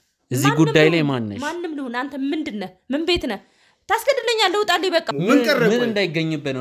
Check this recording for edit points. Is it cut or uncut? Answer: cut